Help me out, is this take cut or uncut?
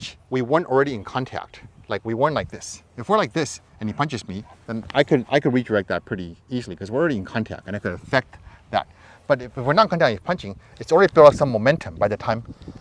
uncut